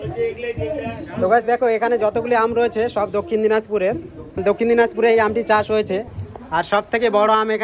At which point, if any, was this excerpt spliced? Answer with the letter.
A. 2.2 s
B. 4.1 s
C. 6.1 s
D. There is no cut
D